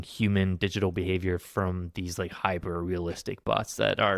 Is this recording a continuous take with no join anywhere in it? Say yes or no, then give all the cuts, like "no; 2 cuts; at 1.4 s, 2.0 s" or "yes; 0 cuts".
yes; 0 cuts